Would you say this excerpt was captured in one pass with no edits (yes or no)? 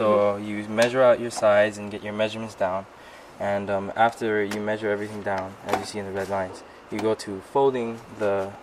yes